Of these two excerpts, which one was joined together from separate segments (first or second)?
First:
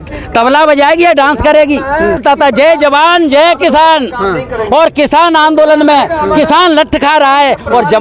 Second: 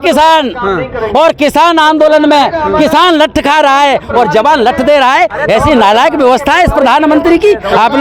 first